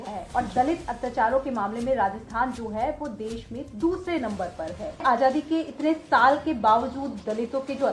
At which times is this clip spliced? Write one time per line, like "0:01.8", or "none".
0:05.0

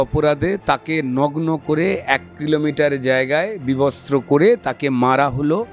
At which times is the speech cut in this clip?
none

